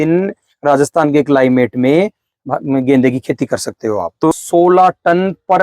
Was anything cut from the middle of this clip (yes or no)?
yes